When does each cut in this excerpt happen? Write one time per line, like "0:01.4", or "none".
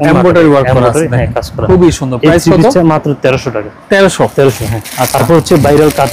none

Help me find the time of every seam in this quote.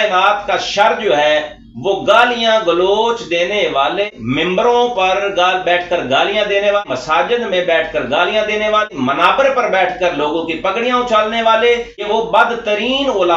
0:04.1
0:06.8
0:08.9
0:12.1

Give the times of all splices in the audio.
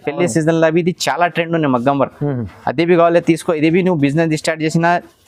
none

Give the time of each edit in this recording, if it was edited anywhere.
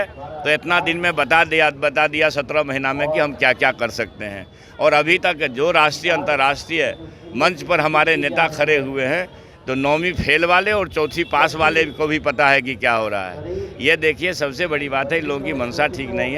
none

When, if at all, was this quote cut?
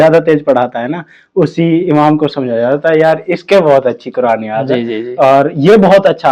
none

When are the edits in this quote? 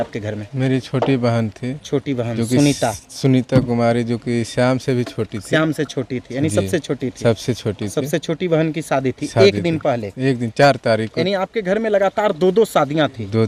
none

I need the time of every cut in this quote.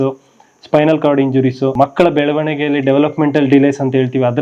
0:01.7

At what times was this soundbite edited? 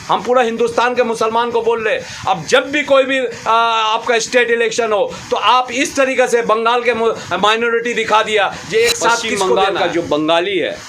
0:09.2

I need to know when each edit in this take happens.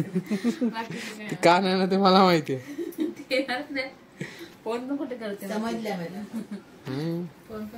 none

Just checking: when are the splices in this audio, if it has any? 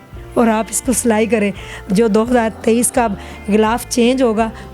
0:01.8

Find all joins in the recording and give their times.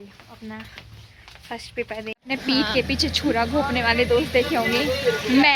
0:02.1

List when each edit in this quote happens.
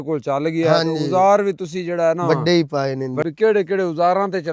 0:03.2

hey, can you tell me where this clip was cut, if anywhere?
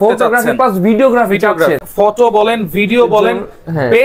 0:01.9

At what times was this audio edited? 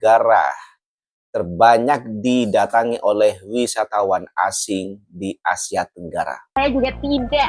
0:06.6

